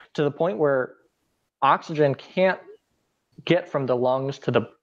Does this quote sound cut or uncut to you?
uncut